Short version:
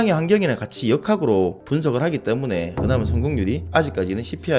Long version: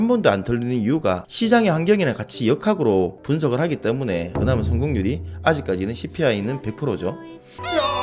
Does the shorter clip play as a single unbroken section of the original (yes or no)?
no